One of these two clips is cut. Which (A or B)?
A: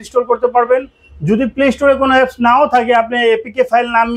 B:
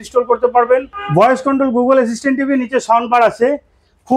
B